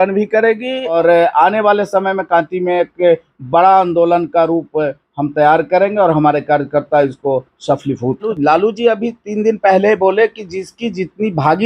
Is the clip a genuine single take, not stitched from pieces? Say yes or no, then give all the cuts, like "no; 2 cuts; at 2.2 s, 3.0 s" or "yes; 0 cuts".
no; 2 cuts; at 0.9 s, 8.3 s